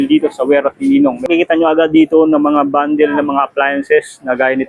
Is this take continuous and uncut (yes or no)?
no